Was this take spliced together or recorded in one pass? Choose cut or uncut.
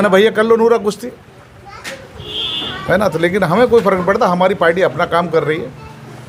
uncut